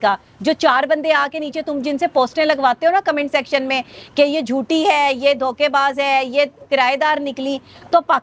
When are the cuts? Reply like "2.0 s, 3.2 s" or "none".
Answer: none

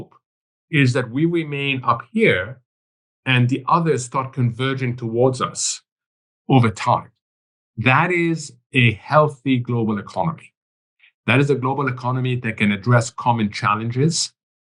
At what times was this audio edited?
none

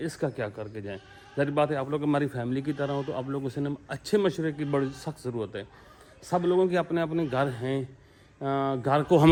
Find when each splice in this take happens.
none

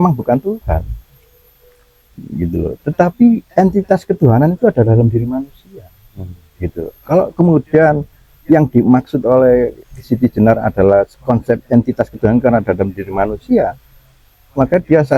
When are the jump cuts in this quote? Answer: none

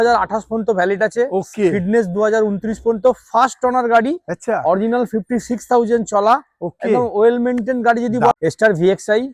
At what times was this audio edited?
8.3 s

